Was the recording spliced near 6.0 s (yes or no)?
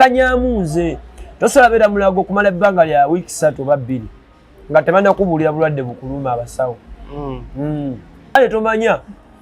no